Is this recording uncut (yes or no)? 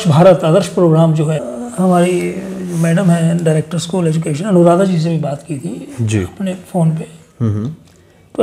no